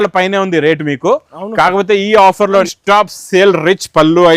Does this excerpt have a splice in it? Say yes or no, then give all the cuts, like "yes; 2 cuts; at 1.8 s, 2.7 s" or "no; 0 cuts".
yes; 1 cut; at 2.7 s